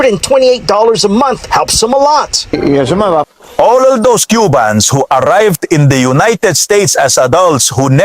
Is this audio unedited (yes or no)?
no